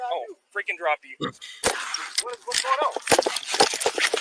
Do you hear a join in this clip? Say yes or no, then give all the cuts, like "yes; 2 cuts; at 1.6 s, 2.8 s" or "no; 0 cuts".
yes; 1 cut; at 1.5 s